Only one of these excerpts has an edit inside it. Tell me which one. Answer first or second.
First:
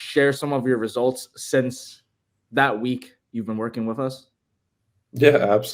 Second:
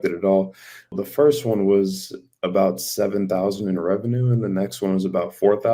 second